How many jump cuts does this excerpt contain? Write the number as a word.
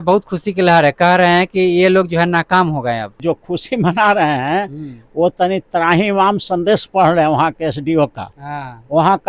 one